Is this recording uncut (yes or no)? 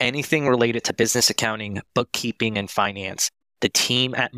yes